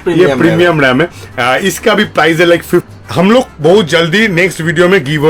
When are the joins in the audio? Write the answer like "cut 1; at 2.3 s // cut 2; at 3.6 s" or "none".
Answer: cut 1; at 2.9 s